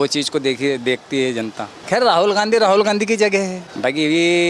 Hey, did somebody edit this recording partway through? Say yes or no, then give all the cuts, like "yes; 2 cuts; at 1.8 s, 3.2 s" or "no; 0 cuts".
yes; 2 cuts; at 1.7 s, 3.6 s